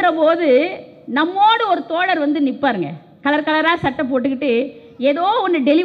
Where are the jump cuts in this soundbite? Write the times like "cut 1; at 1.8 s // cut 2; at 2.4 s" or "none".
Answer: none